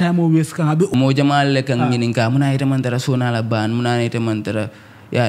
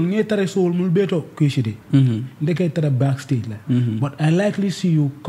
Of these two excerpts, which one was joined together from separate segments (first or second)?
first